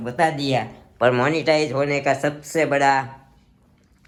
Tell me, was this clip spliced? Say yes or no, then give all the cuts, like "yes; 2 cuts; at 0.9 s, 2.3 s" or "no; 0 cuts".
no; 0 cuts